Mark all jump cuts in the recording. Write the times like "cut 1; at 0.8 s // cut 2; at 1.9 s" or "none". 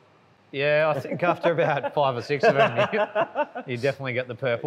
none